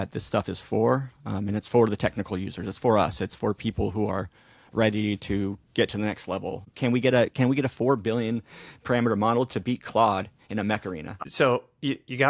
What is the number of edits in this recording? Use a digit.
2